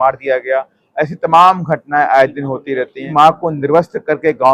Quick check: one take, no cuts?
no; 1 cut; at 3.0 s

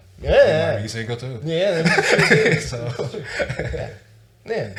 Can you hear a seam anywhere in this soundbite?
no; 0 cuts

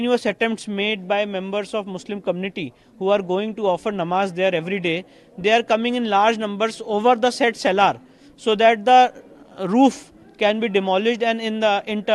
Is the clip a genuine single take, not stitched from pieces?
yes; 0 cuts

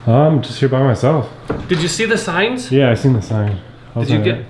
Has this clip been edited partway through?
no; 0 cuts

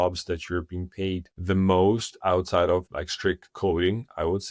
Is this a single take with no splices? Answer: no; 2 cuts; at 1.3 s, 3.0 s

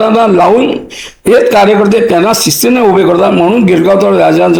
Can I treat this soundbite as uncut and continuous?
yes; 0 cuts

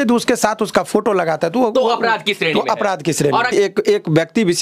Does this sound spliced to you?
yes; 1 cut; at 3.5 s

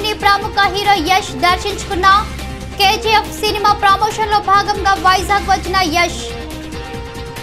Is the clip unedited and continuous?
no; 1 cut; at 6.1 s

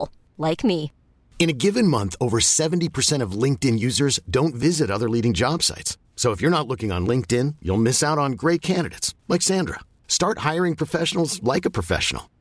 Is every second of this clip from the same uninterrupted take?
yes; 0 cuts

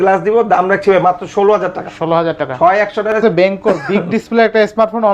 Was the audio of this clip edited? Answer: yes; 1 cut; at 3.2 s

